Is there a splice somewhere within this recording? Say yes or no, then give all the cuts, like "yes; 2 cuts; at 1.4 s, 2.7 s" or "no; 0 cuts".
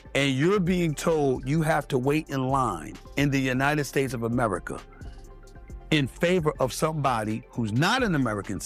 no; 0 cuts